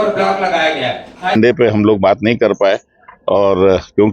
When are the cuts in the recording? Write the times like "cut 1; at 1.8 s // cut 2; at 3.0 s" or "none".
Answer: cut 1; at 1.4 s